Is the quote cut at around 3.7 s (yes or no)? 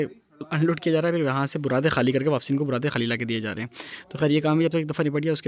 no